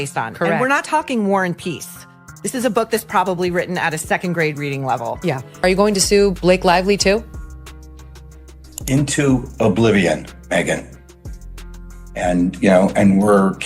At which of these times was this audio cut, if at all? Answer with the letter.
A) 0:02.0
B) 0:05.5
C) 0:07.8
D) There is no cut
B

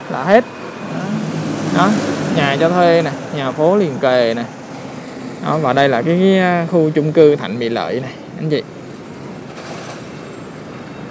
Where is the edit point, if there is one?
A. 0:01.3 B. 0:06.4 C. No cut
A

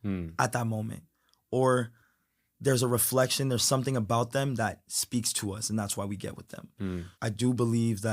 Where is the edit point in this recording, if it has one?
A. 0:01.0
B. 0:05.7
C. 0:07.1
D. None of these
C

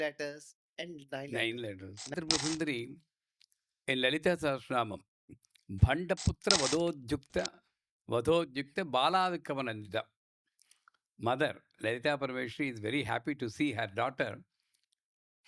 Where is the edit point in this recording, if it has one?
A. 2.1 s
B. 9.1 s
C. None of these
A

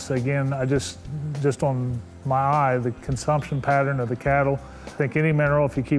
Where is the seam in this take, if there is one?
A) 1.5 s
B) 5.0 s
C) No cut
B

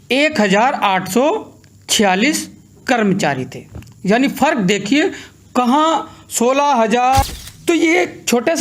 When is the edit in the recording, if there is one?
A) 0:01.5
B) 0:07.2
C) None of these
B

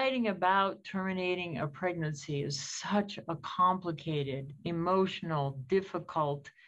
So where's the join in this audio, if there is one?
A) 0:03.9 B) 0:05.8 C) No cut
C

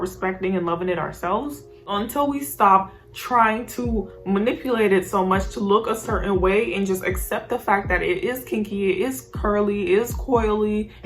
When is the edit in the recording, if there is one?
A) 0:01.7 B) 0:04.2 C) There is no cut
A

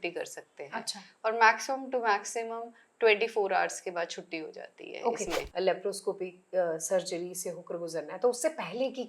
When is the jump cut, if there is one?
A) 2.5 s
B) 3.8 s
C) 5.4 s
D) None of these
C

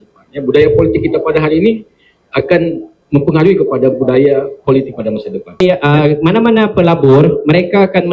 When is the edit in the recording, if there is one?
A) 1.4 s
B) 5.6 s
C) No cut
B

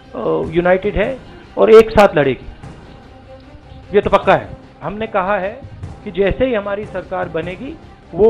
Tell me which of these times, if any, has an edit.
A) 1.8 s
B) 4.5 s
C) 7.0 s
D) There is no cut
B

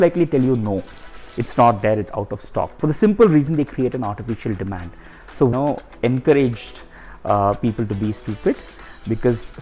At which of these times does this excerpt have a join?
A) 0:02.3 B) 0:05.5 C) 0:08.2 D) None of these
B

